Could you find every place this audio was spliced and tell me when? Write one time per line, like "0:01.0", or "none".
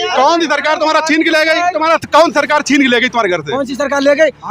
0:01.7